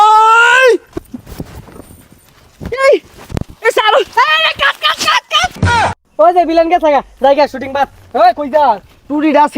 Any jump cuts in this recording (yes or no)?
yes